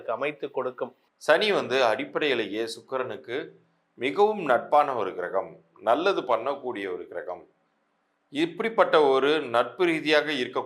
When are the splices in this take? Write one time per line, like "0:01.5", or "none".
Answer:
0:01.0